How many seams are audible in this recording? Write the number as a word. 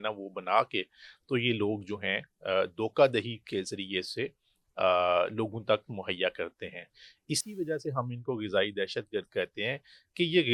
zero